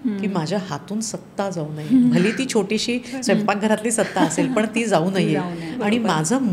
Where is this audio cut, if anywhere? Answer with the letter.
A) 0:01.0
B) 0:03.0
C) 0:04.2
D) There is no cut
D